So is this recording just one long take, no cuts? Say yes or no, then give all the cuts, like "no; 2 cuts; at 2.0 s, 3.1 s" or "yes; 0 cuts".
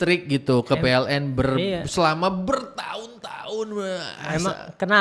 yes; 0 cuts